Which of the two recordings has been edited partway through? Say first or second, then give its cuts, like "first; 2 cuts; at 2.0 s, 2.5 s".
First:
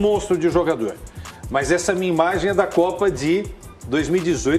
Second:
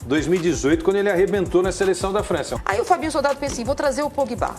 second; 1 cut; at 2.5 s